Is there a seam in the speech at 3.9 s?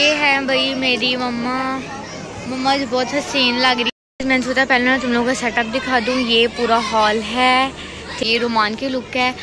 yes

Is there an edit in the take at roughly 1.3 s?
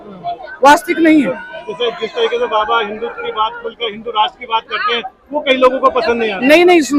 no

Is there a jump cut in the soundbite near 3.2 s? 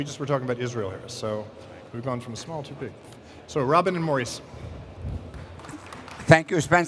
yes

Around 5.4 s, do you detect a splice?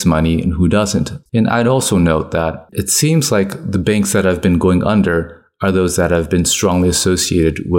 no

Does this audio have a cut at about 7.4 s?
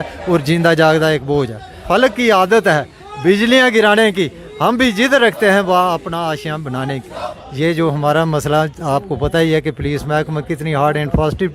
yes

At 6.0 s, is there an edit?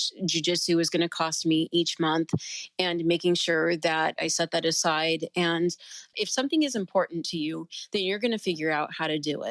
yes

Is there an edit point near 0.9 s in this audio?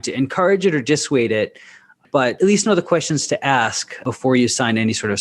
no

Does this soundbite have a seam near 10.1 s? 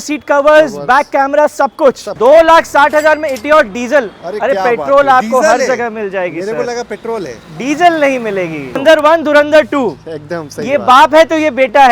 no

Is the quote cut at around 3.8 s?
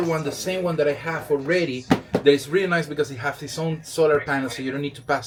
no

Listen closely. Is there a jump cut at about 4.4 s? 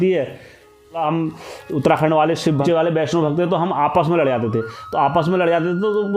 no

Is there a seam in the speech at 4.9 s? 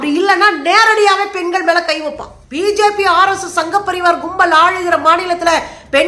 no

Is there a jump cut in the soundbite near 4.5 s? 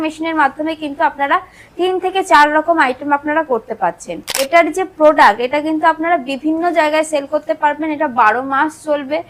yes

